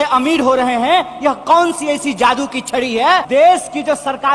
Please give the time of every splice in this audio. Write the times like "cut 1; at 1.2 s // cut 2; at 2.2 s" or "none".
cut 1; at 3.2 s